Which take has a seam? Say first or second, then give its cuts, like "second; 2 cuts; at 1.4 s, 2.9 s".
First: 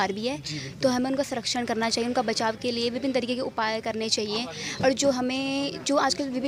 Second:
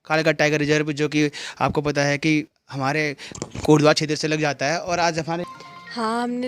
second; 1 cut; at 5.5 s